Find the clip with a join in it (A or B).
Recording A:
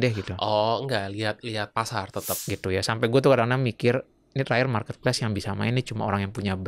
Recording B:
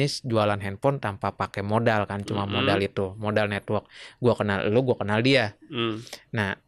A